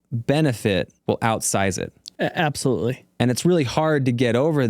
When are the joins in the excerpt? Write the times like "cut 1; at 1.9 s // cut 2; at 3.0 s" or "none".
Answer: cut 1; at 0.9 s // cut 2; at 2.0 s // cut 3; at 3.0 s